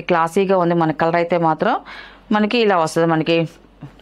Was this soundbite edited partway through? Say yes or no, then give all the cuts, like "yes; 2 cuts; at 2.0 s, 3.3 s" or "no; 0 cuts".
no; 0 cuts